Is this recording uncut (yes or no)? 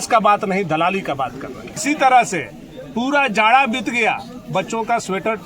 no